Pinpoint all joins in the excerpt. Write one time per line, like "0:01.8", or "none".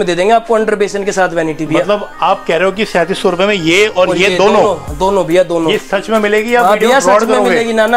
none